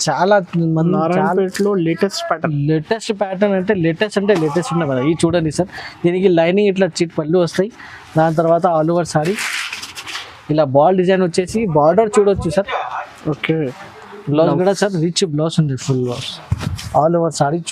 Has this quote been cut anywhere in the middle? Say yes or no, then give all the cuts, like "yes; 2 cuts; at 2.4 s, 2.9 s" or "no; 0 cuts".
yes; 1 cut; at 13.8 s